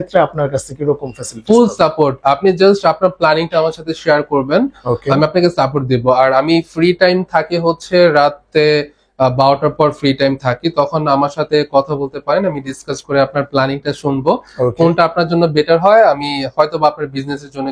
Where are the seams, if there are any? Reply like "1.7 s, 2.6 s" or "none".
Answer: none